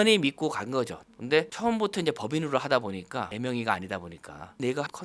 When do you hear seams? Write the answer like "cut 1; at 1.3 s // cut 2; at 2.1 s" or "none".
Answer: cut 1; at 1.1 s